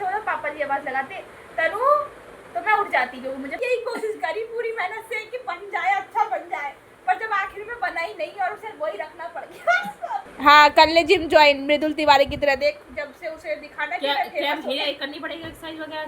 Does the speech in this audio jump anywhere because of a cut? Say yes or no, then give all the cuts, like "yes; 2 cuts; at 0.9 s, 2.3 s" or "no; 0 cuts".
yes; 2 cuts; at 3.6 s, 10.2 s